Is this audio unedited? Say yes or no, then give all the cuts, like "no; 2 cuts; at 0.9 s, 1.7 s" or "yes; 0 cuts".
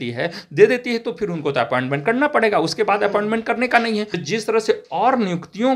no; 1 cut; at 4.2 s